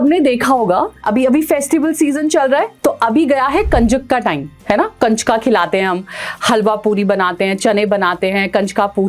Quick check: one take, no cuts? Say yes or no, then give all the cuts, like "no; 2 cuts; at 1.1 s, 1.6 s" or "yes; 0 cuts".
no; 2 cuts; at 1.1 s, 2.7 s